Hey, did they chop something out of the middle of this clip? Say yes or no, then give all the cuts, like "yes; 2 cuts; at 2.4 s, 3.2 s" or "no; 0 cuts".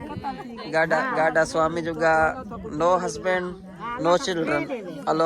no; 0 cuts